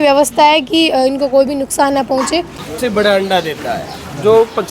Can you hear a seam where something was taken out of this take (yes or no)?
yes